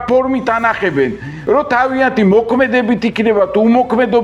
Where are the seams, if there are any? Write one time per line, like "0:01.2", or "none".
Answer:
0:01.3